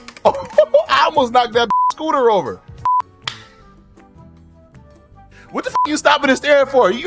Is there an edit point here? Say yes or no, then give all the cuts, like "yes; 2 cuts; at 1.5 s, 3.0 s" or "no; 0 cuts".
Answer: yes; 1 cut; at 3.1 s